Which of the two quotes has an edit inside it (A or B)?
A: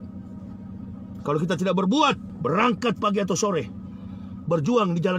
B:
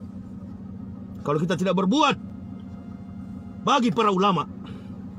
A